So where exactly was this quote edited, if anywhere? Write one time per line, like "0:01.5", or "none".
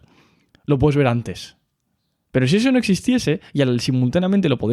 none